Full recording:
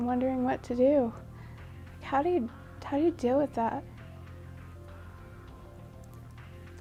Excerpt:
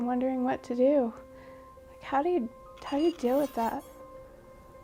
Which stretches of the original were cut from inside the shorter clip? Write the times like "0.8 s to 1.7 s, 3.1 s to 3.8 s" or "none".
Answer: none